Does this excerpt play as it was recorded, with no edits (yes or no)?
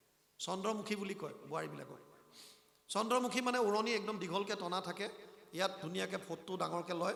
yes